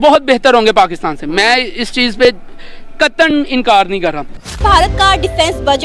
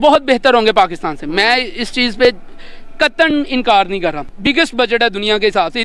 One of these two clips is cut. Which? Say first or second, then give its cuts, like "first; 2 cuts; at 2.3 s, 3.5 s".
first; 1 cut; at 4.3 s